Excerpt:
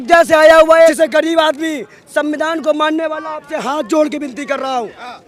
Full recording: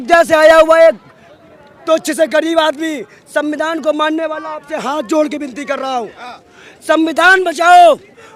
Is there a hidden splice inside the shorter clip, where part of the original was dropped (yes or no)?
yes